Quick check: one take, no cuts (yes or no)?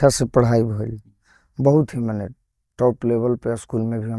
yes